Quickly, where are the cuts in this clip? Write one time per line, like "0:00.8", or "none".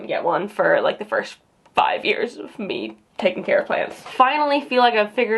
0:04.0